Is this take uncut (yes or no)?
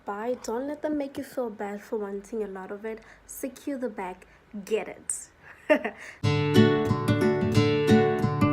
no